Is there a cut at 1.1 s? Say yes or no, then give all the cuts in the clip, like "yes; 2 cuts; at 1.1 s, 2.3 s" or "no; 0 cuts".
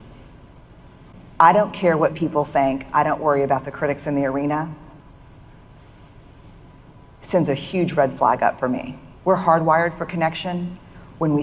yes; 1 cut; at 1.1 s